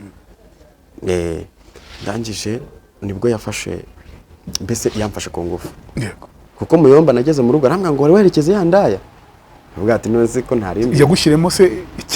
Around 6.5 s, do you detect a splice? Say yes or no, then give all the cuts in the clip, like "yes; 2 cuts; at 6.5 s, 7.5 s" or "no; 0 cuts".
yes; 1 cut; at 6.5 s